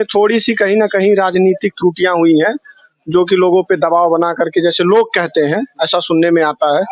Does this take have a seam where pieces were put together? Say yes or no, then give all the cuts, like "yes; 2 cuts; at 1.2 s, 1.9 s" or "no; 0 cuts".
no; 0 cuts